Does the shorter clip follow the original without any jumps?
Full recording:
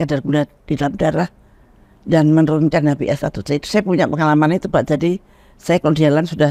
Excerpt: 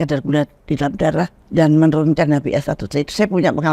no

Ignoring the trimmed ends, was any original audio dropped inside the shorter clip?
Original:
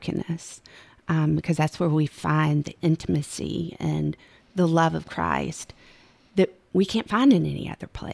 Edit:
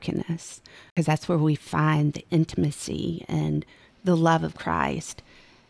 yes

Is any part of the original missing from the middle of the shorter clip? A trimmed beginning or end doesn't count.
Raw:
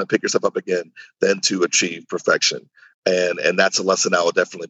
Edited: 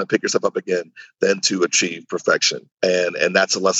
yes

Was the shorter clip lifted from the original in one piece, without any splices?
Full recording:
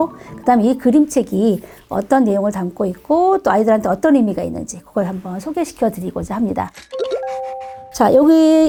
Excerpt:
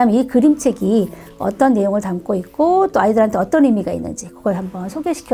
yes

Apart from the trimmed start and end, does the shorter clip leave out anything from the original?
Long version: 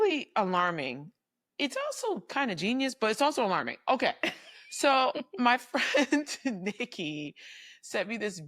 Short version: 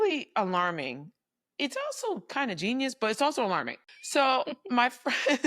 yes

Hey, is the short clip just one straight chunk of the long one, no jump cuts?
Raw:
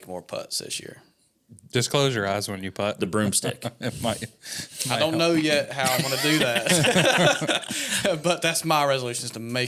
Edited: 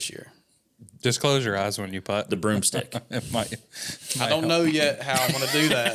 yes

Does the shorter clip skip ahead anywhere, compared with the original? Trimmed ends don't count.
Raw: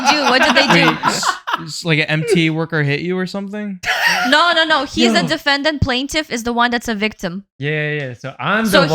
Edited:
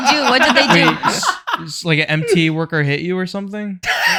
no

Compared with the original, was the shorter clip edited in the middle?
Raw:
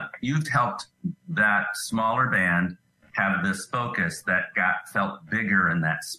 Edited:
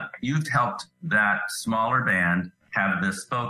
yes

